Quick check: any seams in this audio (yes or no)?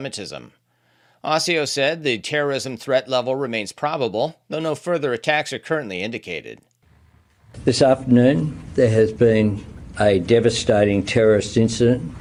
no